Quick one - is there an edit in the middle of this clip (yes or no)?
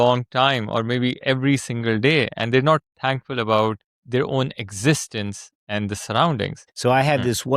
yes